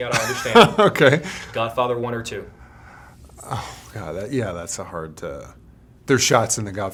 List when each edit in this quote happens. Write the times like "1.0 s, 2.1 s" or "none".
none